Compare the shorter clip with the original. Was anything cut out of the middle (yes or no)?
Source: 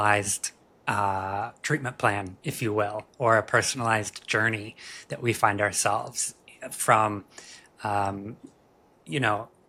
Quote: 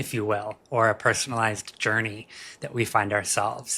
no